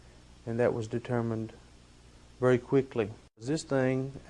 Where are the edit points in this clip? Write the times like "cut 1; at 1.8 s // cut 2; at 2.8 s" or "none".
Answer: cut 1; at 3.1 s